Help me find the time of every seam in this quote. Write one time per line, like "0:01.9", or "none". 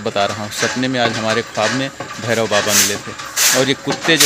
none